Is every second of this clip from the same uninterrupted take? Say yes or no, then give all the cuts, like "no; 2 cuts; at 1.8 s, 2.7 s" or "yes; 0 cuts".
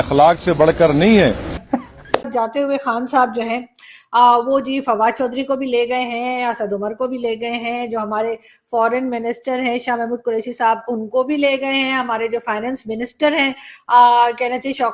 no; 1 cut; at 2.3 s